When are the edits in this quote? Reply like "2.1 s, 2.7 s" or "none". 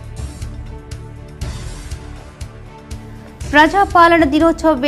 none